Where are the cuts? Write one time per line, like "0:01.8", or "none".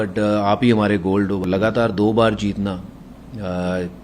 0:01.4

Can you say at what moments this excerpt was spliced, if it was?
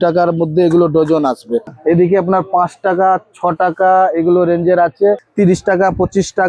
0:01.7
0:05.3

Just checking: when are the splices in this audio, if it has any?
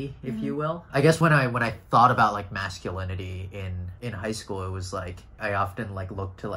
0:01.1
0:03.8
0:05.3

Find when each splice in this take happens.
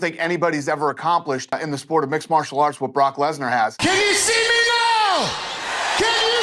0:01.6
0:03.8

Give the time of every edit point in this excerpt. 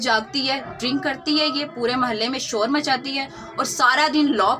none

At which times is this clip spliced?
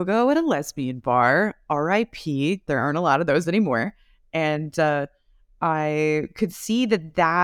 none

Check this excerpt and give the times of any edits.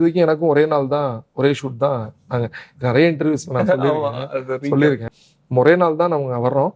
0:05.1

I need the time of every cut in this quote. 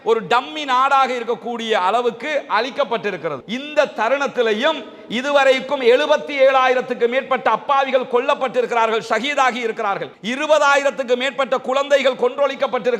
0:03.4

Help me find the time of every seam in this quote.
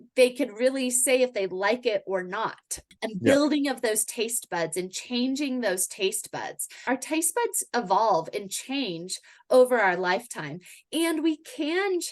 0:02.9
0:06.8

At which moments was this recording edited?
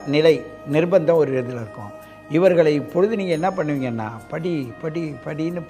none

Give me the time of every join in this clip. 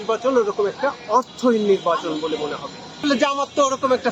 0:03.0

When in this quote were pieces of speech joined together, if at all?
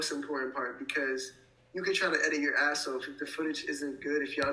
none

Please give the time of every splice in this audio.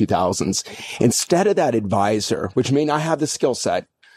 none

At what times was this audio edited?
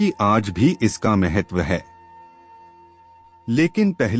none

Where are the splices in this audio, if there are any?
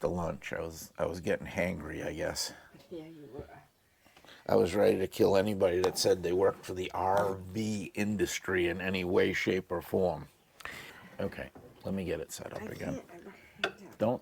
0:10.5

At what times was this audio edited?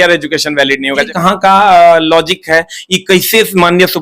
0:01.1

